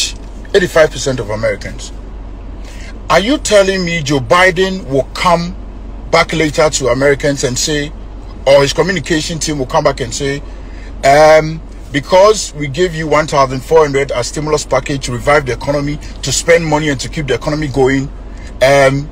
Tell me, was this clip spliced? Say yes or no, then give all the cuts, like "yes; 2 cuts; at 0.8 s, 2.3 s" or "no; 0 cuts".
no; 0 cuts